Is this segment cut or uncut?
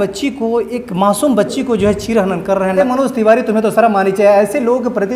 cut